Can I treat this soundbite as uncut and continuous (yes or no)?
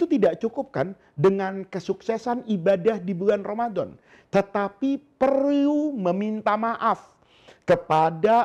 yes